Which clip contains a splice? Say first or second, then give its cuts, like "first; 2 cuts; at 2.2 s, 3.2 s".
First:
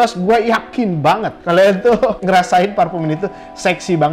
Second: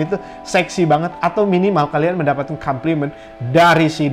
first; 2 cuts; at 1.3 s, 2.2 s